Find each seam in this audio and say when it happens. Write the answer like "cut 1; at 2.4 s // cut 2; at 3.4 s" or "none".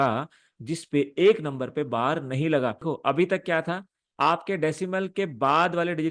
cut 1; at 2.8 s